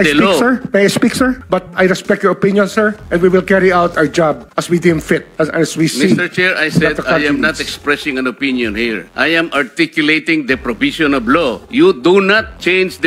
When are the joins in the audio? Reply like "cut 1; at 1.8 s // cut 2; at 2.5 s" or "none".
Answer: cut 1; at 1.4 s